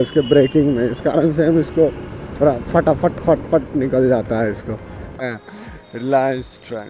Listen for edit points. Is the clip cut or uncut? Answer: cut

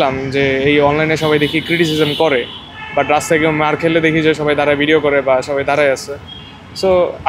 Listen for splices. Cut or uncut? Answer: uncut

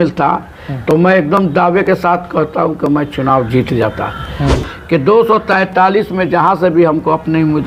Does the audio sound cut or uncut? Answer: cut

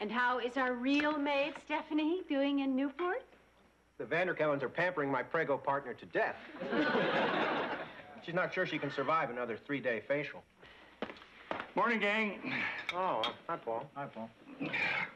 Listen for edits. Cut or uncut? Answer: cut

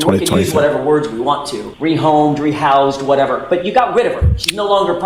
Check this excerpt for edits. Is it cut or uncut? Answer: uncut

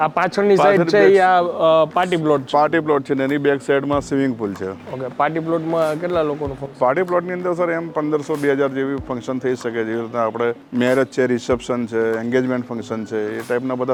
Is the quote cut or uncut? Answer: uncut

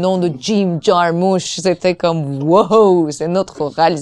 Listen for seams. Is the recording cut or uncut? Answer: uncut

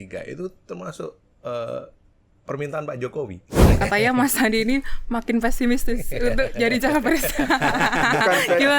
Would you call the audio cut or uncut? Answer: cut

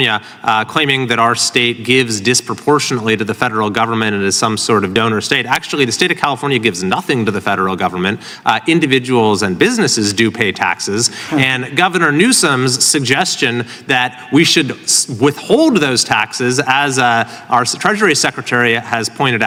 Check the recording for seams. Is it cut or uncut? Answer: uncut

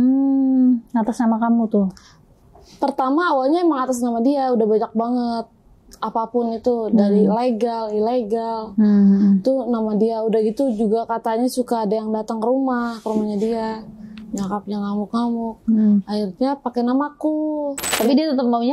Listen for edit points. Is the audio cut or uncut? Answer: cut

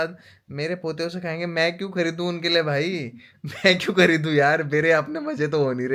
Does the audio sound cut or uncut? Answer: uncut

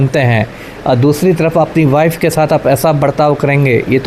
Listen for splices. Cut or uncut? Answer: uncut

